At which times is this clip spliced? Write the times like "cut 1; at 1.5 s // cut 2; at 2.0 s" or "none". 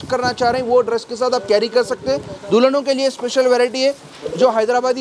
none